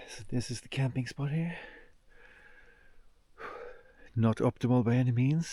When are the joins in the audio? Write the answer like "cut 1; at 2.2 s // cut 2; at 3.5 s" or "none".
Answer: none

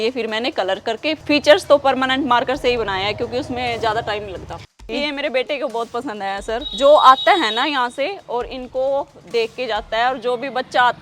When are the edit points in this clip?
cut 1; at 1.2 s // cut 2; at 4.8 s // cut 3; at 6.7 s

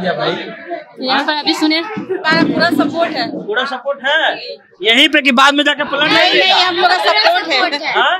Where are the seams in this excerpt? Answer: cut 1; at 2.2 s

